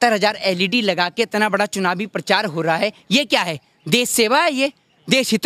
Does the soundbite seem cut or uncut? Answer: uncut